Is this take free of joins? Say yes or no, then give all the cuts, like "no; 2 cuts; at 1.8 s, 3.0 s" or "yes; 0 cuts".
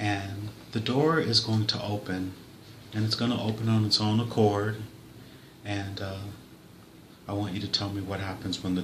no; 1 cut; at 5.8 s